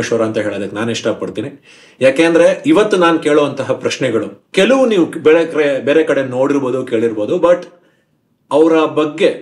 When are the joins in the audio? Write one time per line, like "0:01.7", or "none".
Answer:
0:04.4